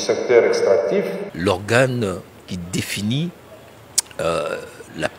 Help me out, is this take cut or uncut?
cut